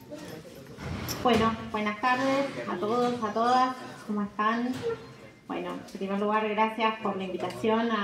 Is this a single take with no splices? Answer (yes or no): no